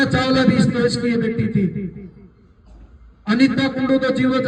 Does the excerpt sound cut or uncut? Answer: uncut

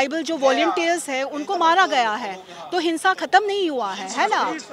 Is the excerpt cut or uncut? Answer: uncut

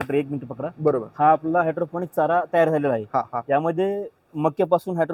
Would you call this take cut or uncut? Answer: uncut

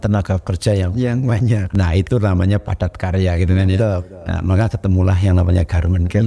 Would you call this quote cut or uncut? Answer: uncut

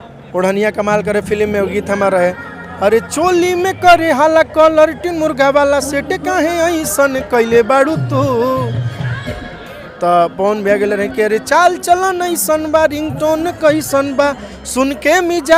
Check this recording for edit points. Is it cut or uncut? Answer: uncut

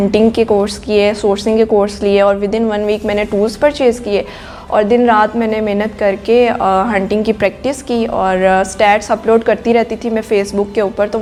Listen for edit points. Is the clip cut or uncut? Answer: uncut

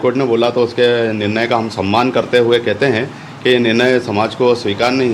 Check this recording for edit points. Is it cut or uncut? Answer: uncut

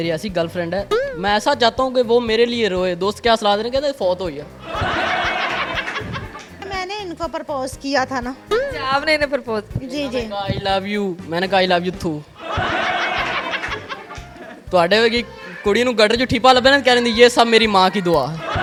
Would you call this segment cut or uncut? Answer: uncut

